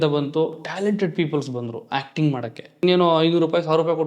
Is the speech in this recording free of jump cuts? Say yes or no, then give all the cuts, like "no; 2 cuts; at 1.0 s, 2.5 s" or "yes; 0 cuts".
no; 1 cut; at 2.8 s